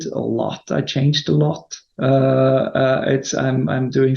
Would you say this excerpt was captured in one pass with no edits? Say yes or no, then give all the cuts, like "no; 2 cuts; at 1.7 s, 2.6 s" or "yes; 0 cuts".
yes; 0 cuts